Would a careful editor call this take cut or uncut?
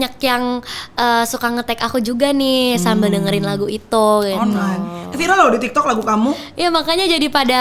uncut